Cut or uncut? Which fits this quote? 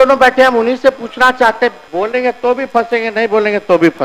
cut